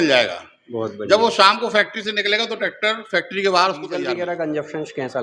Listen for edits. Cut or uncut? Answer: cut